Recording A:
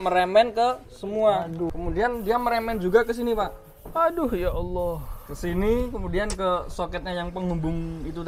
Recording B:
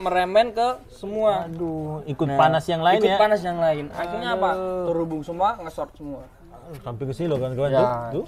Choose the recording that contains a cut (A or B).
A